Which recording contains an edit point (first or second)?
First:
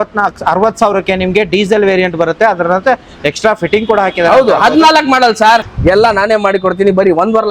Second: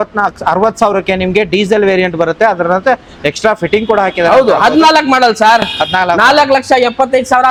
first